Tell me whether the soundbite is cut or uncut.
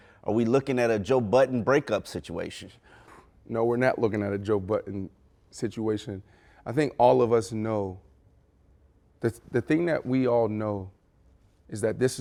uncut